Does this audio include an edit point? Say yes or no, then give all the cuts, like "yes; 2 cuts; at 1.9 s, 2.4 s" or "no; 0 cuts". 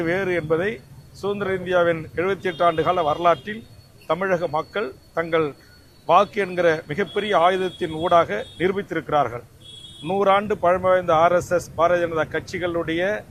no; 0 cuts